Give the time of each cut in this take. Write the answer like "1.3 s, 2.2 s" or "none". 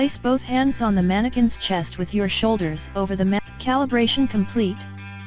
3.4 s